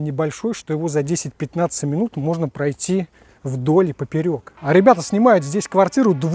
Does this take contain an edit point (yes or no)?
yes